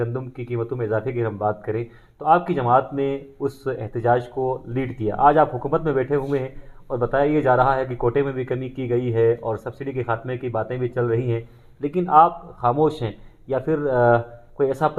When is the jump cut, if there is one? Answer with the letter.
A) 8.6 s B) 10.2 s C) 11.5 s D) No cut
D